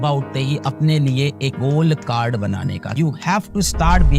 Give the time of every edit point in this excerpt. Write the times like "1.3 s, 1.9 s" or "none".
3.0 s